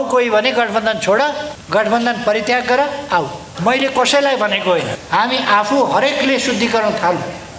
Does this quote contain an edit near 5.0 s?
yes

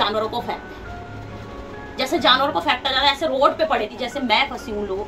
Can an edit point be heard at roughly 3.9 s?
yes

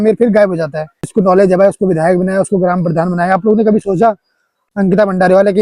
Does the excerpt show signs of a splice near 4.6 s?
yes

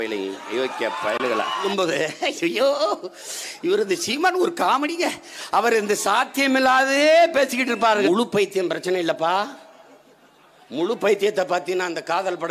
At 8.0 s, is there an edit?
yes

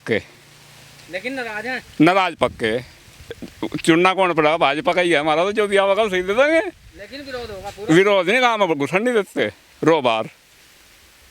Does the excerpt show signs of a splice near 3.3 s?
yes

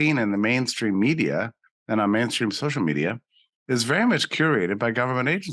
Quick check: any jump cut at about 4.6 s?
no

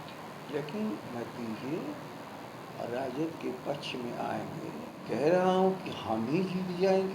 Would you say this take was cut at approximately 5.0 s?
yes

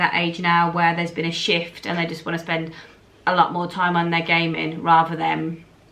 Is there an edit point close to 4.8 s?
no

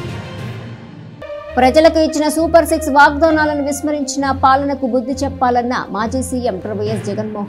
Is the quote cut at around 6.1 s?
no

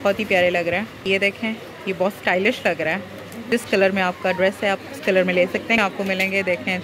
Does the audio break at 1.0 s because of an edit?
yes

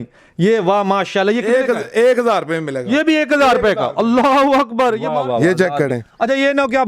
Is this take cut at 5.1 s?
yes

